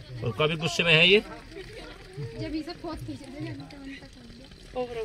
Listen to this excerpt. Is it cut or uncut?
uncut